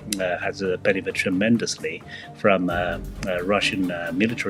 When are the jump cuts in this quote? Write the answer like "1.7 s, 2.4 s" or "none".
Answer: none